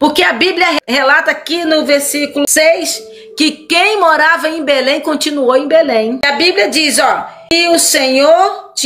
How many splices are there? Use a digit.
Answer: 4